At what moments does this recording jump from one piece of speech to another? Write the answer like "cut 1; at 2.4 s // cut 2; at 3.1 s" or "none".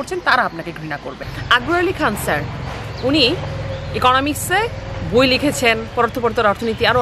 cut 1; at 1.3 s